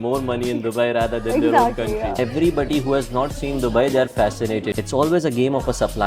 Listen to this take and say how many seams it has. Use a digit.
2